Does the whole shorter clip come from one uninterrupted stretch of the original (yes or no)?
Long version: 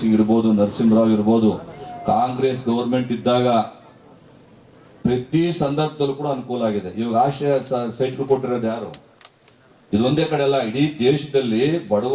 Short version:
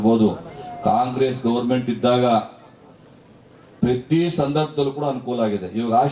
yes